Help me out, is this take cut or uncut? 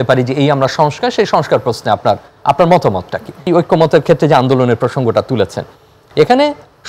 cut